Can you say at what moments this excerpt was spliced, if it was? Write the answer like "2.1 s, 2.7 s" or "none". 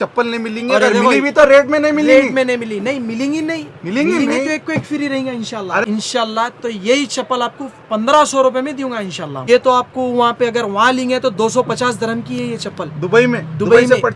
5.8 s, 9.3 s

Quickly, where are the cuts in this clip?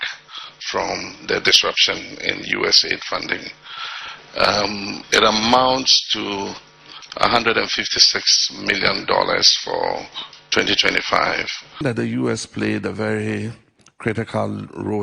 11.8 s

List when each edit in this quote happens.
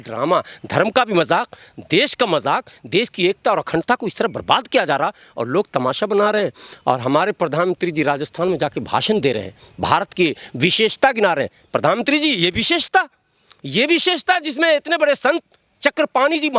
none

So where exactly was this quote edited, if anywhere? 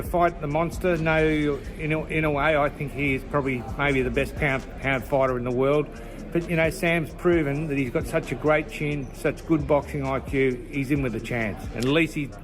none

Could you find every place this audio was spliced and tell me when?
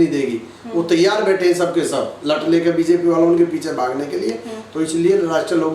none

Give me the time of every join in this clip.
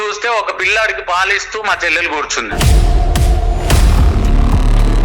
2.5 s

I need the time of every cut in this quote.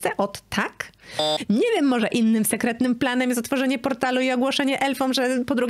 1.3 s

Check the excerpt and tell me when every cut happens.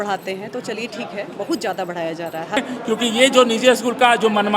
2.6 s

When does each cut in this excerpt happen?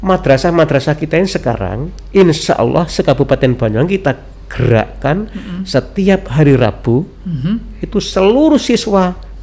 none

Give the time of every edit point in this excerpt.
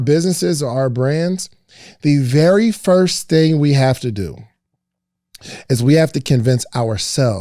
none

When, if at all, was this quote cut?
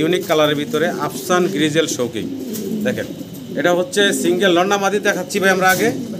none

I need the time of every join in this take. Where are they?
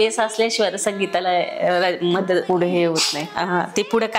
none

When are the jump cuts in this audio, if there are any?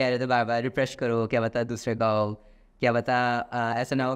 none

